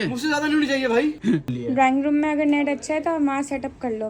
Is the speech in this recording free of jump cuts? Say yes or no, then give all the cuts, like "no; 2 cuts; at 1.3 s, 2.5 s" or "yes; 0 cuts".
no; 1 cut; at 1.5 s